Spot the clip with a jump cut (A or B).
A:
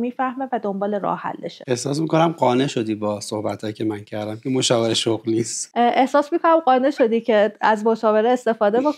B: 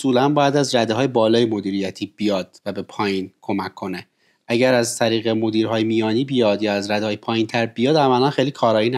A